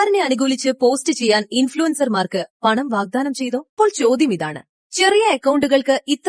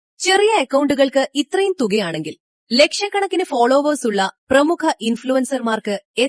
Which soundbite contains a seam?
first; 1 cut; at 3.7 s

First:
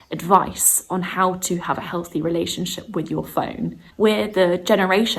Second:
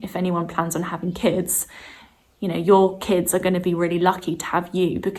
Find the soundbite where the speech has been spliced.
first; 1 cut; at 3.8 s

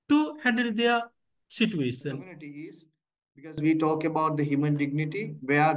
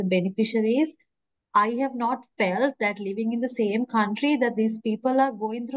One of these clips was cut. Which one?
first; 1 cut; at 2.7 s

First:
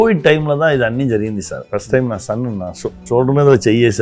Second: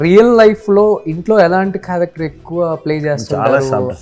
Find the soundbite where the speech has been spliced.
first; 2 cuts; at 1.6 s, 3.0 s

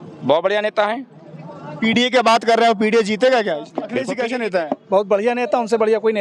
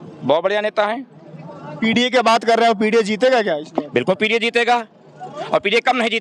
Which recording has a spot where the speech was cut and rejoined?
first; 1 cut; at 4.0 s

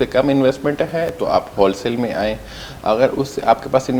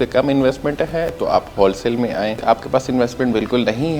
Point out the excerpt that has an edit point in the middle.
second; 1 cut; at 2.4 s

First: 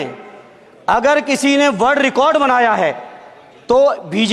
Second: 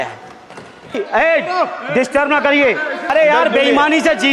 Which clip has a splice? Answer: second; 2 cuts; at 1.0 s, 3.1 s

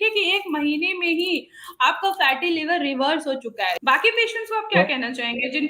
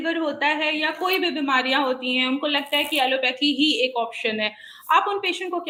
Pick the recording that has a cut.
first; 1 cut; at 3.8 s

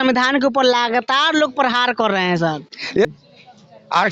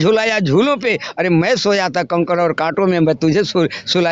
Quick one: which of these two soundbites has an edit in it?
first; 1 cut; at 3.1 s

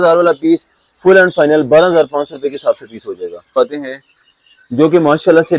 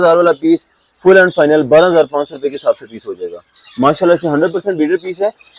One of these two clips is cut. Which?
first; 1 cut; at 3.6 s

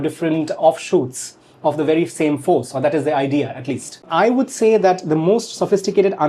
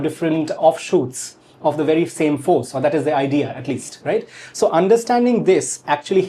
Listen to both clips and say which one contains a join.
first; 1 cut; at 4.0 s

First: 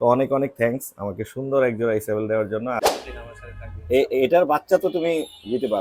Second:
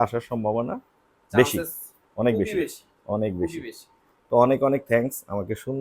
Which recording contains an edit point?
first; 1 cut; at 2.8 s

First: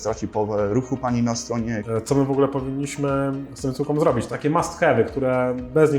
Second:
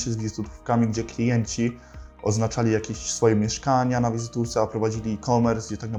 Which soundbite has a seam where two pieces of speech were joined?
first; 2 cuts; at 1.8 s, 4.3 s

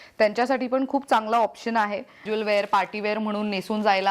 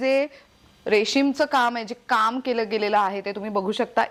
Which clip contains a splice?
first; 1 cut; at 2.3 s

